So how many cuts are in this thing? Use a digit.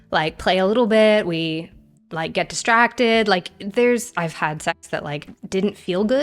1